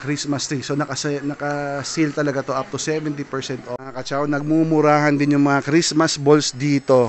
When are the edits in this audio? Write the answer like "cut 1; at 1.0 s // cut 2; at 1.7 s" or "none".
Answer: cut 1; at 3.9 s